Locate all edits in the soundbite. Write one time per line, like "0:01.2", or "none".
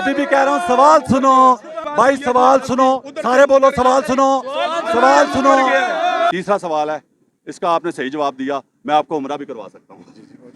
0:01.8
0:06.3